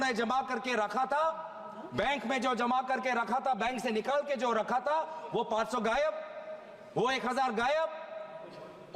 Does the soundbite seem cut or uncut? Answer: uncut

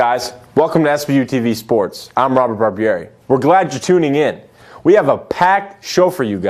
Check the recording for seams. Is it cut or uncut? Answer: uncut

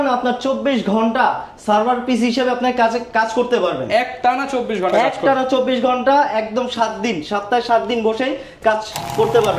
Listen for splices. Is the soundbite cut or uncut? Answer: uncut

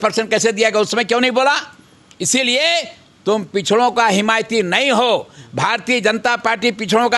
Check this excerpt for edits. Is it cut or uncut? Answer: uncut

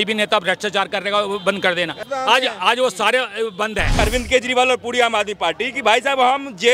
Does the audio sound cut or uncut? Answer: cut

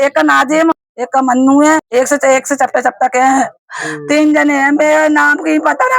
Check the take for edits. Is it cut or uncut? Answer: cut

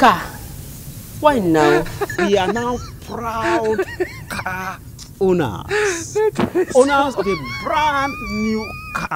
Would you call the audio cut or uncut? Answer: cut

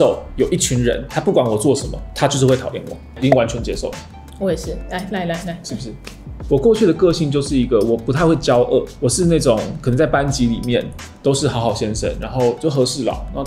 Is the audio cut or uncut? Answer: uncut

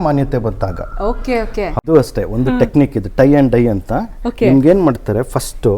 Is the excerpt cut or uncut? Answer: cut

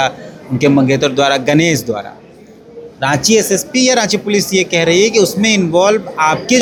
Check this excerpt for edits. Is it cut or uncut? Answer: uncut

